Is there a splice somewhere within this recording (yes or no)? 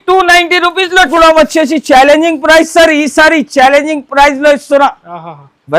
yes